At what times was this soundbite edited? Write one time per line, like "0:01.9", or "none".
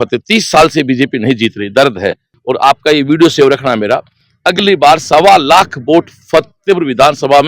0:02.3